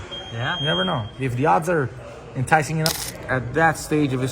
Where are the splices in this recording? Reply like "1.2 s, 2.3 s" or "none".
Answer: 2.9 s